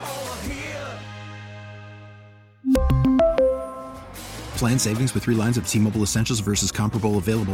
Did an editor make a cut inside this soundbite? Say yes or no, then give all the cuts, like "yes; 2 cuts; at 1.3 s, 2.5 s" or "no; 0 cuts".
no; 0 cuts